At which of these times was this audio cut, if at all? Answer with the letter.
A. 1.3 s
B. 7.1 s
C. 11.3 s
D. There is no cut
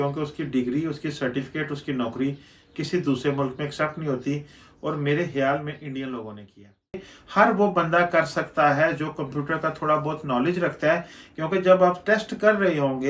B